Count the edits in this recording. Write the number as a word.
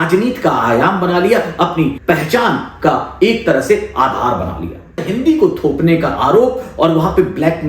two